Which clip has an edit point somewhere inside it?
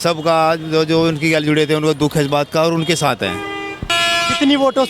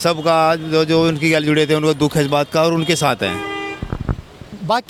first; 1 cut; at 3.9 s

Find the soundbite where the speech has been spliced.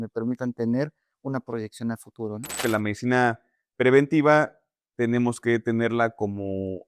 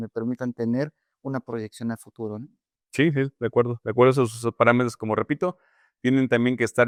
first; 1 cut; at 2.6 s

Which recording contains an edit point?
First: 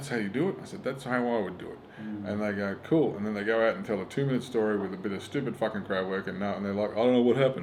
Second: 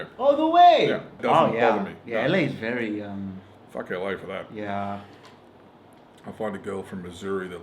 second; 1 cut; at 1.2 s

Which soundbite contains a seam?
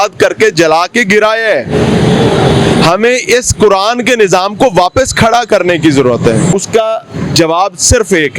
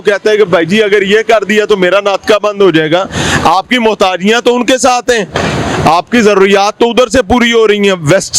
first; 1 cut; at 6.5 s

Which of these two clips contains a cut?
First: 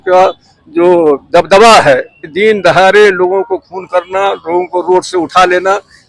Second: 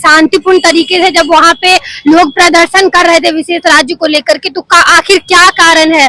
first; 1 cut; at 2.3 s

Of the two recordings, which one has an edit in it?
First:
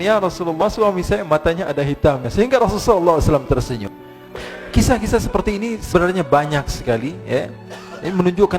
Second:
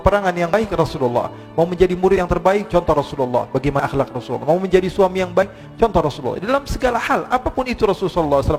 first; 1 cut; at 4.3 s

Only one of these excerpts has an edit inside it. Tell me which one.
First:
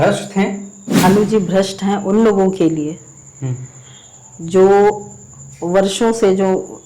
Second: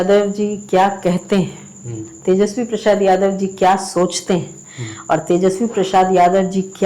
first; 1 cut; at 1.0 s

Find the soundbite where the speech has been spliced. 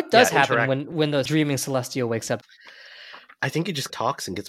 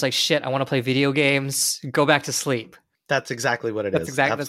first; 2 cuts; at 0.9 s, 2.4 s

